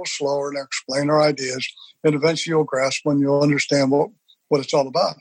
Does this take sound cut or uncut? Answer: uncut